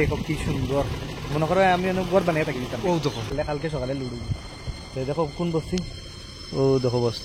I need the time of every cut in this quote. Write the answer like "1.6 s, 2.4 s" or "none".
3.3 s